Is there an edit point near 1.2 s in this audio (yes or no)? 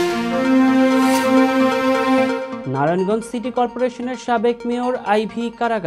no